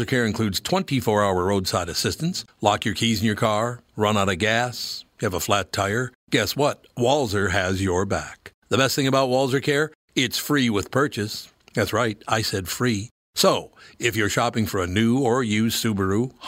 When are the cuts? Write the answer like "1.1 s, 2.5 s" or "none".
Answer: none